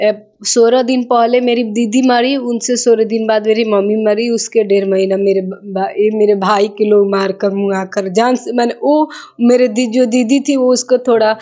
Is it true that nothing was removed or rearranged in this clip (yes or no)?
yes